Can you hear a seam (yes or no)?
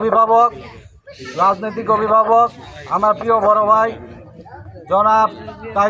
no